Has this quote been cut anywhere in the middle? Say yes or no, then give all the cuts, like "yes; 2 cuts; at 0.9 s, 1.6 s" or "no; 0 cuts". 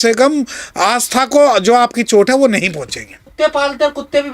no; 0 cuts